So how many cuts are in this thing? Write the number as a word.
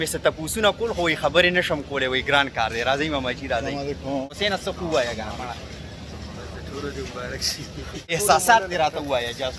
two